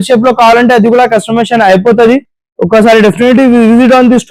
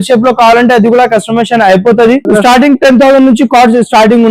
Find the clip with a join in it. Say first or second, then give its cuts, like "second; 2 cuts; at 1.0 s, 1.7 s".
second; 1 cut; at 2.3 s